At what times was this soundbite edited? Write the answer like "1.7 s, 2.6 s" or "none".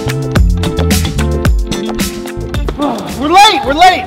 2.6 s